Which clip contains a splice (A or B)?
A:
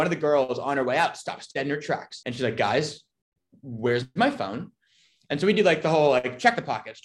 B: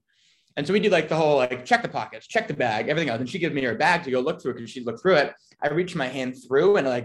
A